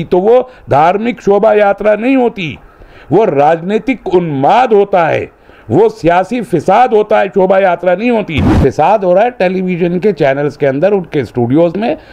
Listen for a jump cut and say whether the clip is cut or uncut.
cut